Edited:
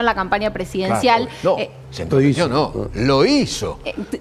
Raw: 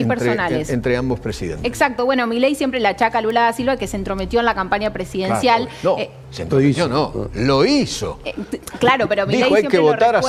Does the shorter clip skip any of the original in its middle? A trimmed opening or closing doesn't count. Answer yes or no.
no